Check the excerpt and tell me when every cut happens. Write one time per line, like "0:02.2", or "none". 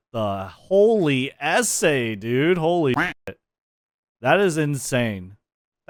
none